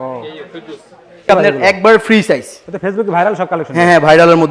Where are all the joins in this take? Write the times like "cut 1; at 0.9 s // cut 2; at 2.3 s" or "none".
cut 1; at 1.3 s